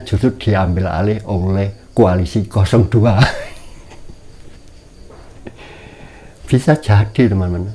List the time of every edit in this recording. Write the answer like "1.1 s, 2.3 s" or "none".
none